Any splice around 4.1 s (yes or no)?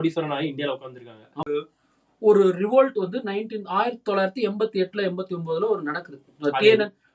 no